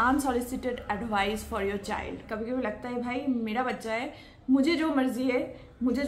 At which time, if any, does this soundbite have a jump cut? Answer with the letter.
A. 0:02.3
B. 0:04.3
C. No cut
A